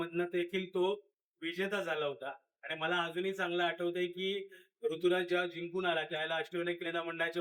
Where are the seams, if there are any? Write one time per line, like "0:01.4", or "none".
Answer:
none

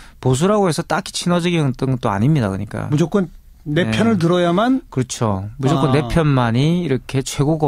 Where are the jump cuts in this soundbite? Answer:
0:05.3

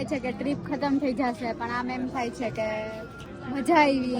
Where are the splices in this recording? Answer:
none

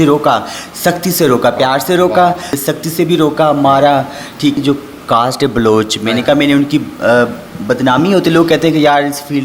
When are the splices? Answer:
0:02.6
0:04.6

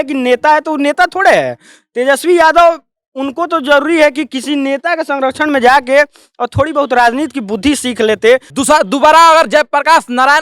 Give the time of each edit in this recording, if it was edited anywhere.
0:08.5

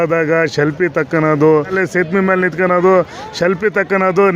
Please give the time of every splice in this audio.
0:01.7

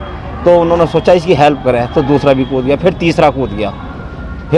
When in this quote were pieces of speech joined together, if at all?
none

